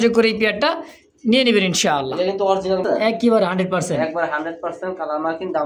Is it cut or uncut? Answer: cut